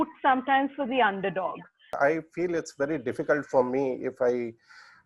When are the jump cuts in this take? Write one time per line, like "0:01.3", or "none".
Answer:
0:02.0